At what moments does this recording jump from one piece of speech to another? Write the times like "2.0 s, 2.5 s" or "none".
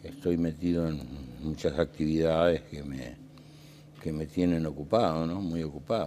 2.5 s